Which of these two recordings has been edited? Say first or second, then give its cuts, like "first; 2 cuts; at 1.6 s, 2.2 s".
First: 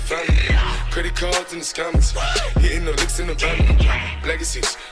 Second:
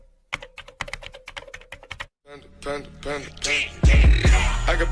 second; 1 cut; at 2.1 s